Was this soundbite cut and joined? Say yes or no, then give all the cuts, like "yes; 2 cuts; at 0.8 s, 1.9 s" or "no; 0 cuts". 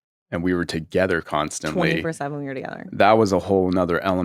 no; 0 cuts